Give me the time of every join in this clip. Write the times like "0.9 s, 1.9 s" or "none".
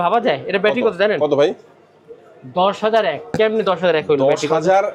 none